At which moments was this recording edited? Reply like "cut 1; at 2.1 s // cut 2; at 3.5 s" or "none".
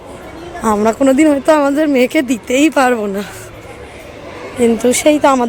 none